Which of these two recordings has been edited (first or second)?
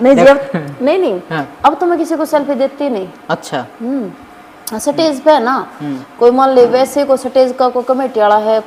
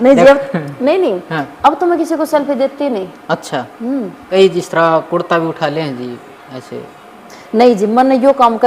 second